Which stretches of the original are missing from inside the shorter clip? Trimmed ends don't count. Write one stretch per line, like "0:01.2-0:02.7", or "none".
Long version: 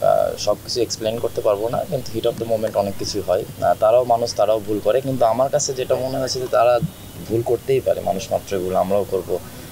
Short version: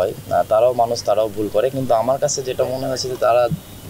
none